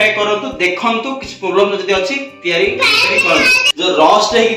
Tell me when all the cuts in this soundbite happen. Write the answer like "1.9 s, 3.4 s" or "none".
3.3 s